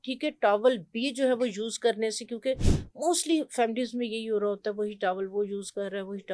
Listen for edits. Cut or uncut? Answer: uncut